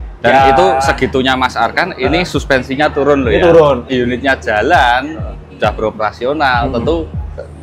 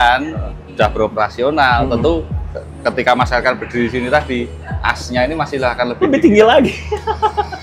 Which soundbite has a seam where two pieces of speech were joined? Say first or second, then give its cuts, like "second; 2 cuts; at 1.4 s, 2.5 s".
first; 1 cut; at 3.9 s